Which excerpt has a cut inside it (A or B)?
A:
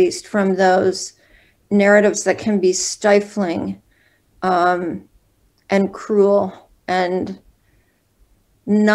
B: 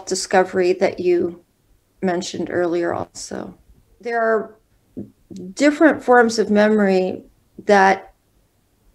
B